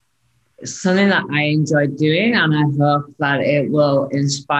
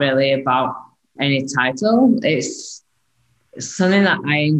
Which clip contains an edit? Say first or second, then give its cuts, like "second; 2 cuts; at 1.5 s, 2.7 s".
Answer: second; 1 cut; at 1.1 s